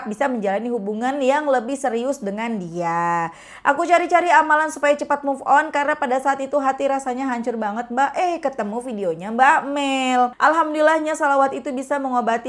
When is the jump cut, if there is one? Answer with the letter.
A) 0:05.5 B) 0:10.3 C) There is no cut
B